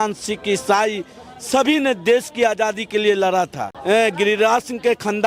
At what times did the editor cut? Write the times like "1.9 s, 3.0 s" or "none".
3.7 s